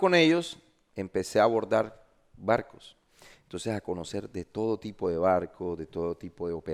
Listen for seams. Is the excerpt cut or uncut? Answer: uncut